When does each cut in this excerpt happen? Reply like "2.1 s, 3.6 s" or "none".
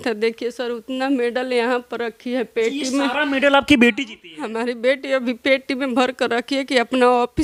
none